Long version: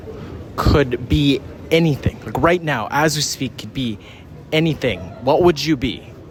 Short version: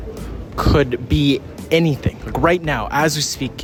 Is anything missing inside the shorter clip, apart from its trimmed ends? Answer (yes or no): no